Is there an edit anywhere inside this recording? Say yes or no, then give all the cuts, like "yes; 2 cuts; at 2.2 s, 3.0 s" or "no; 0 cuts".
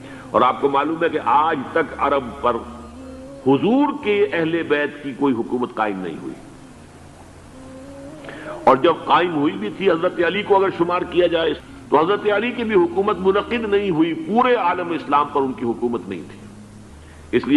yes; 1 cut; at 11.6 s